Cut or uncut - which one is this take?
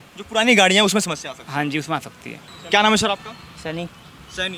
uncut